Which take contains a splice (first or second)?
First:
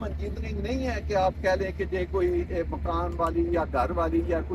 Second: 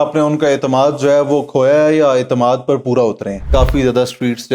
second